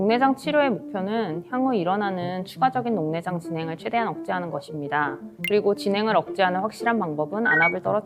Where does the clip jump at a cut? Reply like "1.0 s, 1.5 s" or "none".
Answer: none